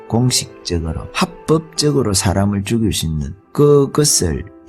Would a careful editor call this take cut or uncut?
cut